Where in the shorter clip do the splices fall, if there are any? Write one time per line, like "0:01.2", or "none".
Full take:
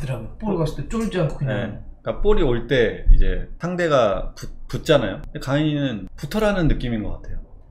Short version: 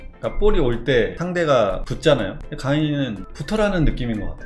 0:01.2
0:01.9